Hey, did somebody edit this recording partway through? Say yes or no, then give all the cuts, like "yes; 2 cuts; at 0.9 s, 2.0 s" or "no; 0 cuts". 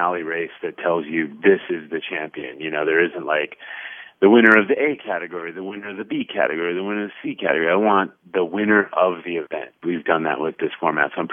yes; 2 cuts; at 9.8 s, 10.6 s